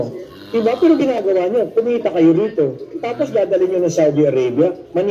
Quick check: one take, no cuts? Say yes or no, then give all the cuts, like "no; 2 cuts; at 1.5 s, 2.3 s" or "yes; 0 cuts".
yes; 0 cuts